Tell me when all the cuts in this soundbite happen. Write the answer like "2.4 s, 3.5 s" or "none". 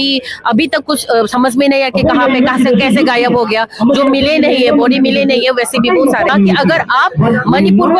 6.3 s